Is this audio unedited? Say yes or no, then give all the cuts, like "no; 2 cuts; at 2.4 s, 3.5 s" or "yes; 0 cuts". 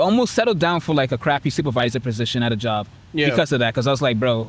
yes; 0 cuts